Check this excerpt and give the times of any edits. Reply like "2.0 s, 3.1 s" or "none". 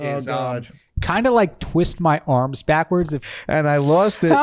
3.2 s